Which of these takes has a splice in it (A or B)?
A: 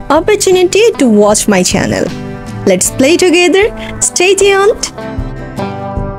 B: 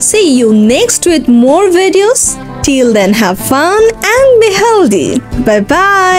A